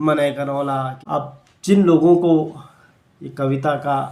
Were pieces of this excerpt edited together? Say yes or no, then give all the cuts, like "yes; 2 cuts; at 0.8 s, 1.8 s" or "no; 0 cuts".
yes; 1 cut; at 1.0 s